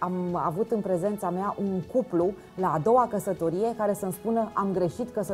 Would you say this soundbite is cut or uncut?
uncut